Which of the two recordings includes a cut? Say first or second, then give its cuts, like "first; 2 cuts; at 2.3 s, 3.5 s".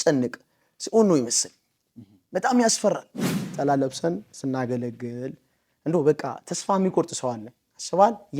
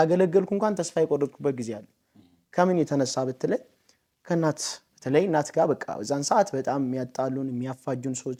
first; 1 cut; at 3.5 s